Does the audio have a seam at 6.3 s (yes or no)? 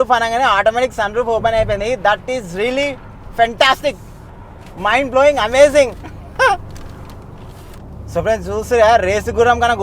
no